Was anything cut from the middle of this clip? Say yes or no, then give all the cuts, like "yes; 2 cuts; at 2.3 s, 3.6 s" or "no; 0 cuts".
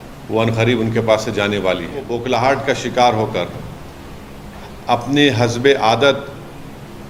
yes; 1 cut; at 2.2 s